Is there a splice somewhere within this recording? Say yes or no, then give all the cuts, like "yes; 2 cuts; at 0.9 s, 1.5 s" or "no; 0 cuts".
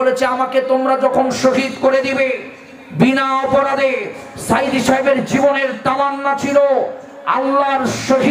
no; 0 cuts